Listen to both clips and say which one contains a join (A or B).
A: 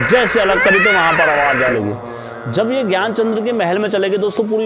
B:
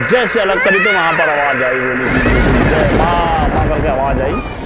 A